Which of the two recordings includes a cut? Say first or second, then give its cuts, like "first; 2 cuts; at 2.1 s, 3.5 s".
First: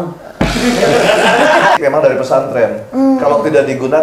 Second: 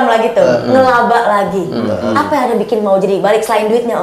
first; 1 cut; at 1.8 s